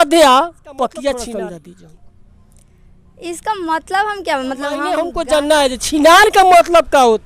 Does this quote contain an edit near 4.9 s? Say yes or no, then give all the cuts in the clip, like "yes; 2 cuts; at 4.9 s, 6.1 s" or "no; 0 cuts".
yes; 2 cuts; at 1.2 s, 4.9 s